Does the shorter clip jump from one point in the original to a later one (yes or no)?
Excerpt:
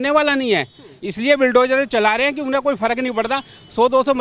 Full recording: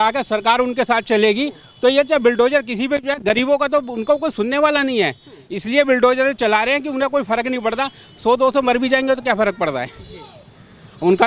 no